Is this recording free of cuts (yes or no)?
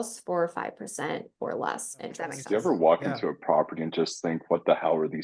no